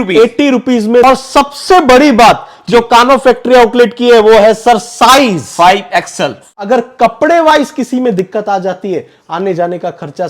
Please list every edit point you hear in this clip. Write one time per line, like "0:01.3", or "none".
0:01.0
0:06.4